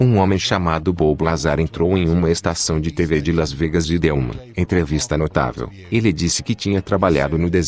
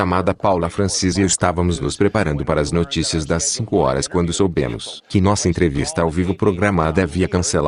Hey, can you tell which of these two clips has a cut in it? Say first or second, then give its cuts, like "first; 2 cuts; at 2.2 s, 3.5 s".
first; 1 cut; at 4.4 s